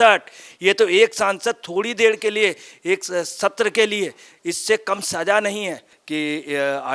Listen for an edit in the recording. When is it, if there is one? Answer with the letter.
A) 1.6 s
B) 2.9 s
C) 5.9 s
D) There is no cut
C